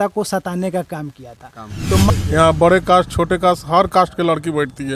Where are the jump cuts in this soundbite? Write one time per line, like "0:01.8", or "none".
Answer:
0:02.1